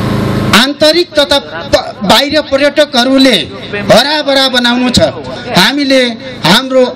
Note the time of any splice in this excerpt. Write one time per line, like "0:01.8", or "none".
0:05.3